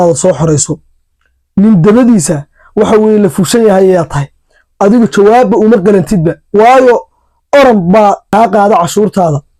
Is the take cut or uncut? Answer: cut